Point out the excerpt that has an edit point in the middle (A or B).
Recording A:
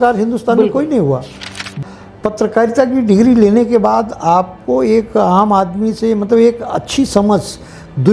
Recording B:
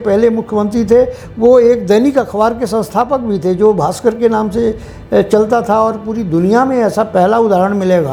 A